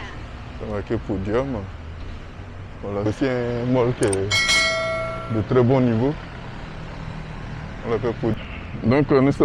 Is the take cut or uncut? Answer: cut